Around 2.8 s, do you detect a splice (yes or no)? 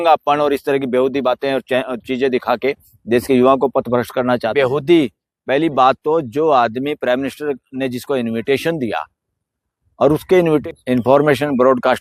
no